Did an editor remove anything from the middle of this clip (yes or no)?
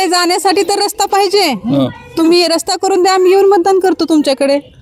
no